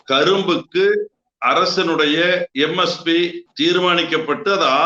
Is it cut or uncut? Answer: cut